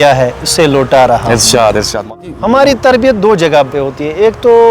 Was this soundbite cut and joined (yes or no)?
yes